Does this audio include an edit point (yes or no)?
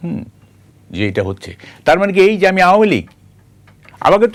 no